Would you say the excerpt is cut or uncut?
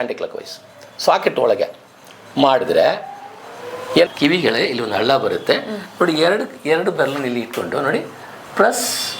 cut